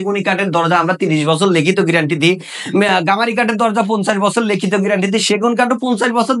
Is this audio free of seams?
yes; 0 cuts

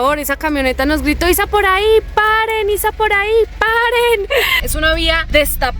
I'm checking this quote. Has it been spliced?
yes; 1 cut; at 4.6 s

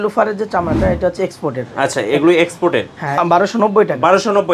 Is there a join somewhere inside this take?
yes; 1 cut; at 3.2 s

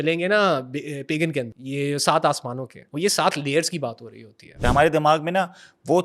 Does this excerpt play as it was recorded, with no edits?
no; 3 cuts; at 1.6 s, 2.8 s, 4.5 s

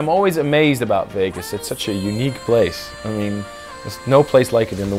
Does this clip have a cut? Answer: no; 0 cuts

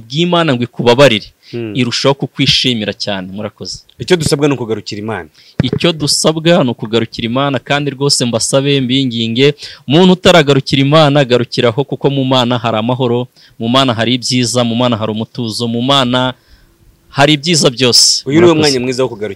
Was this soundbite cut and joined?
no; 0 cuts

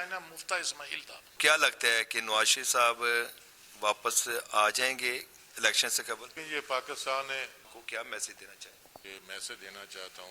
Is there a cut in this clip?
yes; 4 cuts; at 1.4 s, 6.4 s, 7.7 s, 9.0 s

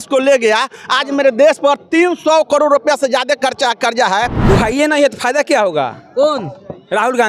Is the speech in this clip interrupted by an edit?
yes; 1 cut; at 4.4 s

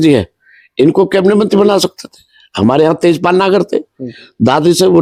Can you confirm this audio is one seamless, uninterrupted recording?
yes; 0 cuts

